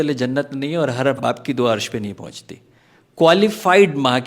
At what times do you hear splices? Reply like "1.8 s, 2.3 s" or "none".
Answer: 1.2 s